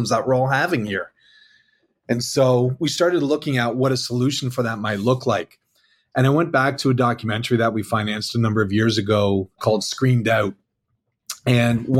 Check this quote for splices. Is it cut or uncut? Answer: uncut